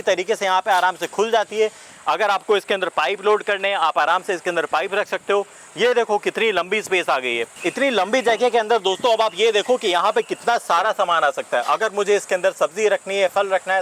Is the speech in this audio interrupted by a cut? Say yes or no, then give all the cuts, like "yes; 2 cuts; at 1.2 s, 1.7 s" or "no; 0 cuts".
no; 0 cuts